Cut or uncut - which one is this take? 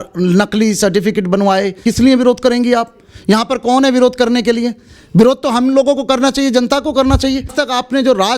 cut